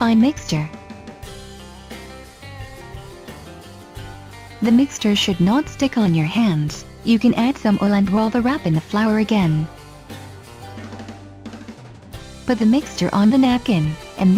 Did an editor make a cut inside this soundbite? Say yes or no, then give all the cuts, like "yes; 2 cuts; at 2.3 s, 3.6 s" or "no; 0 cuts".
yes; 1 cut; at 10.5 s